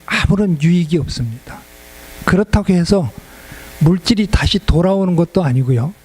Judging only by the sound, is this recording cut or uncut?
uncut